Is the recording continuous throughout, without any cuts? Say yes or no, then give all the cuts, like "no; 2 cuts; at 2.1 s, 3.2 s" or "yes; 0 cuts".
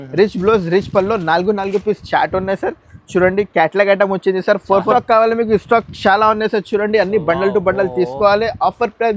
no; 1 cut; at 4.9 s